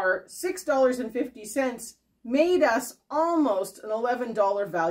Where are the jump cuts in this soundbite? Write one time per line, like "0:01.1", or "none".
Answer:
none